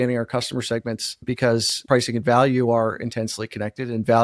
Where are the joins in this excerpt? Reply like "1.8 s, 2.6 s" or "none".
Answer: 1.7 s

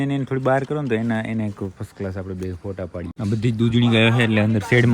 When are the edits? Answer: 3.1 s

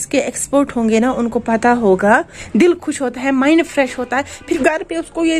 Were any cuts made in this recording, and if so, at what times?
2.4 s, 4.6 s

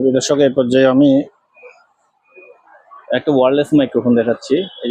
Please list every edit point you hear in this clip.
none

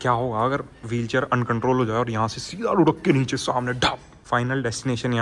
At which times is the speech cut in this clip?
4.1 s

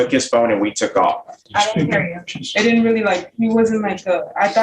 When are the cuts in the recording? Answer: 1.4 s

